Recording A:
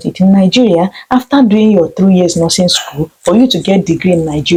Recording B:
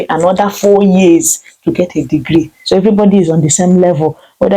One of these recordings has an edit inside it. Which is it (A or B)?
B